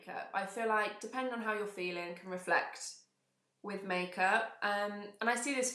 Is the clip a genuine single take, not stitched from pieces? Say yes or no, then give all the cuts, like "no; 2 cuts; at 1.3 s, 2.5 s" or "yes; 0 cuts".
yes; 0 cuts